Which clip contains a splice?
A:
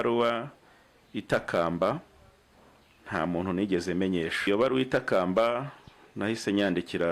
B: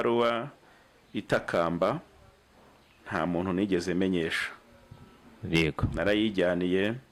A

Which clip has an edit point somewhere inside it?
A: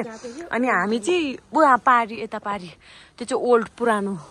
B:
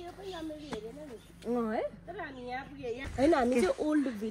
B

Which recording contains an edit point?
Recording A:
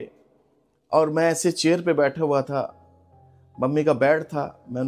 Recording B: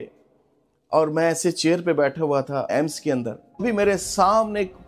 B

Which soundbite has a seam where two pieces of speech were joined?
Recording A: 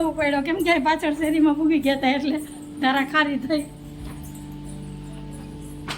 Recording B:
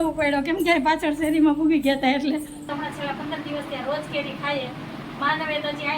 B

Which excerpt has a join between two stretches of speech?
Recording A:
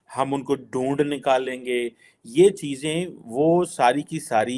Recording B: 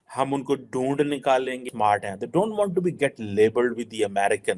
B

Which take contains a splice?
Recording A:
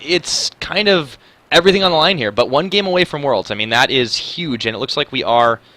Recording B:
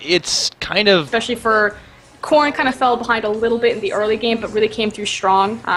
A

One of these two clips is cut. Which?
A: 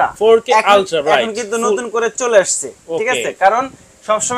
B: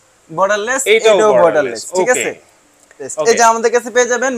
B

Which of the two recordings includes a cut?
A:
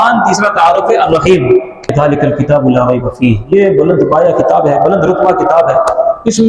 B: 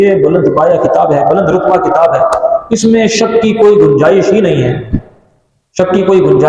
A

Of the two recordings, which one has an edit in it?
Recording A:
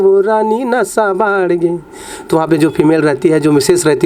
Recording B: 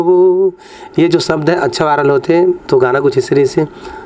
B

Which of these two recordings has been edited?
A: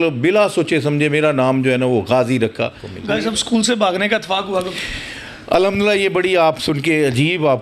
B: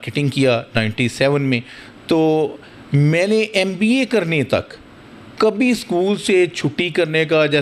A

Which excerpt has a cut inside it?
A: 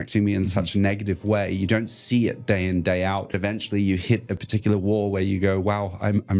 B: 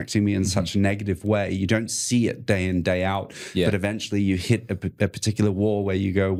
A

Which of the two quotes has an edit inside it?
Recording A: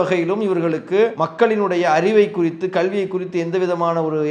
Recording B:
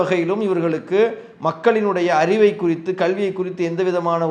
A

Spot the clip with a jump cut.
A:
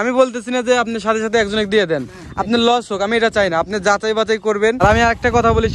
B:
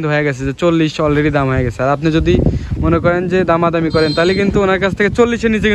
A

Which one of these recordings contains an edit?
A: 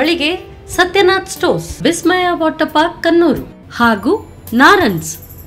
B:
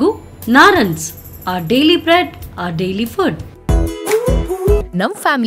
B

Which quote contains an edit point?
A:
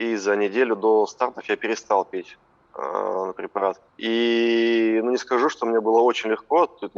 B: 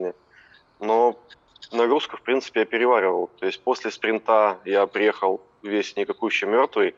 A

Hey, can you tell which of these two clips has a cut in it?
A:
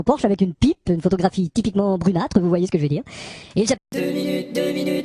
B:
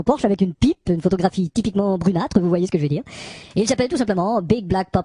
B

